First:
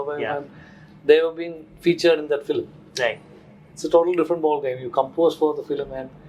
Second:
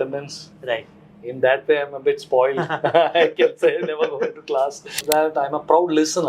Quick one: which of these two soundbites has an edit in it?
second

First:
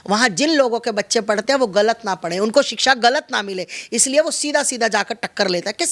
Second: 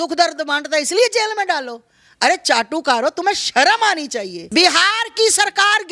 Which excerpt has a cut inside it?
second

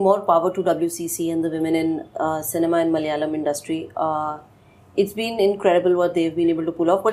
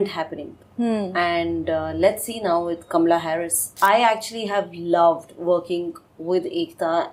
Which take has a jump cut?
second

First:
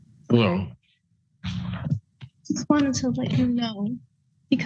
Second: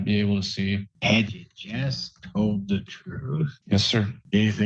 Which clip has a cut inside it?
second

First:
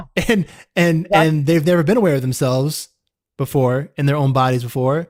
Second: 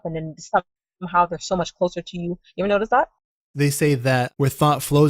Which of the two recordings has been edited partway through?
second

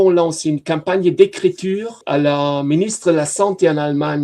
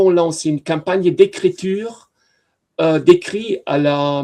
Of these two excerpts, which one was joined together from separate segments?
first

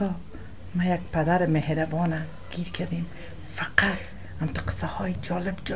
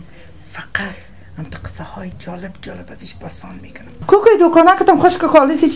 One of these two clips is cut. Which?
second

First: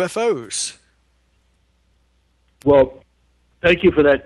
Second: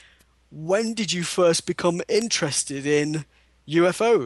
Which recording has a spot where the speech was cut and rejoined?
second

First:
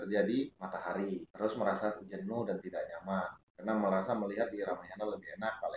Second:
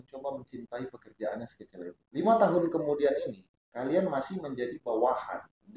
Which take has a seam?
first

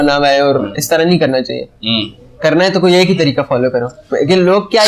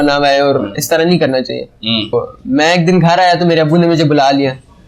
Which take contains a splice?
second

